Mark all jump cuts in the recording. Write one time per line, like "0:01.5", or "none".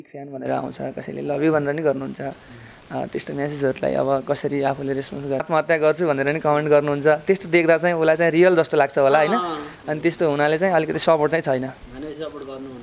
0:05.4